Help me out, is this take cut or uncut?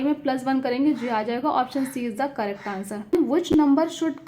cut